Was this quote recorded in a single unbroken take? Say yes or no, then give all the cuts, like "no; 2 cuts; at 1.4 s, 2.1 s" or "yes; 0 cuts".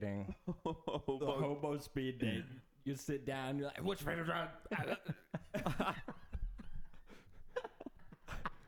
yes; 0 cuts